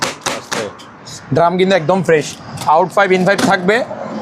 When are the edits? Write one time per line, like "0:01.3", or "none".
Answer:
0:01.0

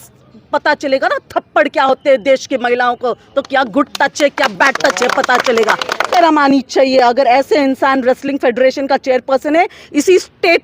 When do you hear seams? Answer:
0:06.1

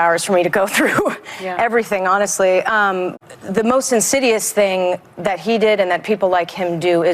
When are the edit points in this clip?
0:03.1

